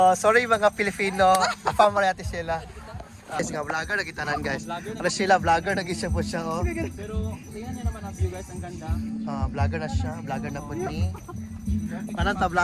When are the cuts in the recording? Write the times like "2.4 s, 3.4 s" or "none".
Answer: 3.4 s

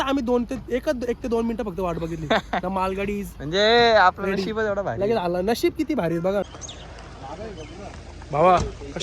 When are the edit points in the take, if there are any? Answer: 6.4 s

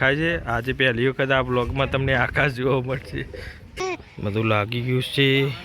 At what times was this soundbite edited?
3.8 s

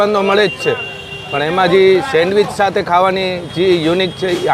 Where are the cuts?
none

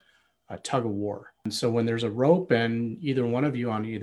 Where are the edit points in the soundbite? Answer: 1.5 s

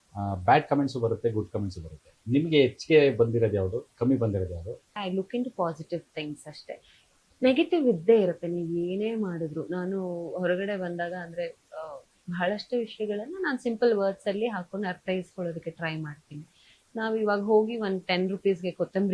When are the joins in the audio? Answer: 4.9 s

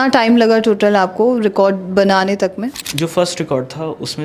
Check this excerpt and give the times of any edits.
2.8 s

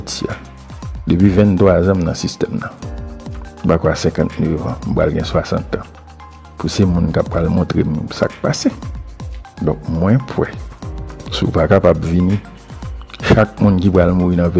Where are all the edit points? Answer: none

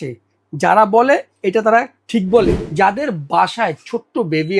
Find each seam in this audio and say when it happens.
2.6 s

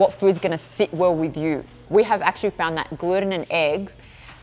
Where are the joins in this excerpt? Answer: 1.8 s

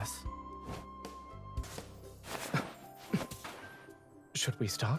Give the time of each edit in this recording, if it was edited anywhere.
1.6 s

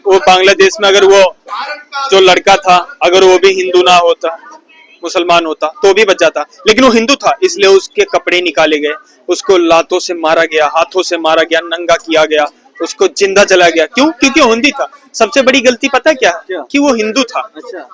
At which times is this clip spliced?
none

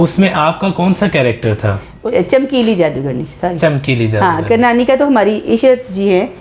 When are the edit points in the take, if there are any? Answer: none

